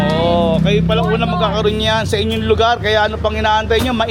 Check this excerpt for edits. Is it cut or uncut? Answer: uncut